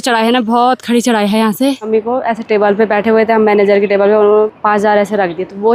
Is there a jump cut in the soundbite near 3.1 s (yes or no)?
no